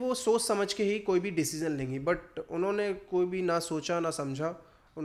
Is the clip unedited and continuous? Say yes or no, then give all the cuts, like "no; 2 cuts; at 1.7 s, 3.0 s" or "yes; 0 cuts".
yes; 0 cuts